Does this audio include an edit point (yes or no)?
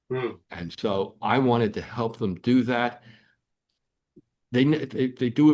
no